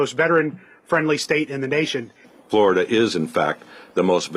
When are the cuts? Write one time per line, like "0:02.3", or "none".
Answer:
0:02.3

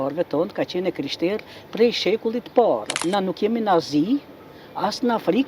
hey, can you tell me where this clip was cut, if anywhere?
0:03.1

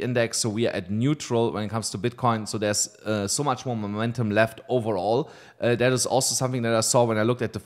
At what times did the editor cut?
none

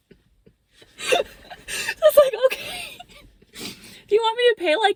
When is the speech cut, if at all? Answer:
none

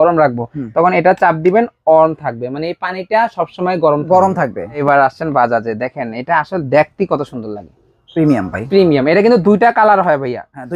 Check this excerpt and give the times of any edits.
0:04.8

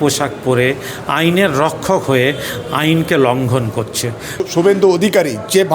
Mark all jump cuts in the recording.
0:04.4

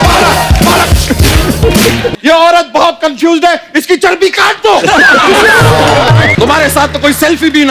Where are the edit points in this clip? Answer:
0:02.1
0:06.3

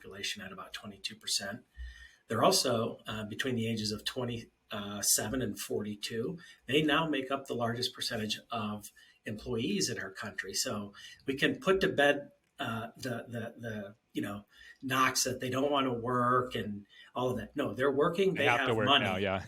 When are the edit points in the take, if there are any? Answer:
none

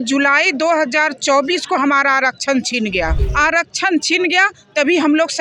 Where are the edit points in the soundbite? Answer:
0:03.2

